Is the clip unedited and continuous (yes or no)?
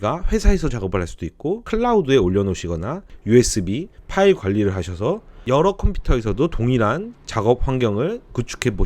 no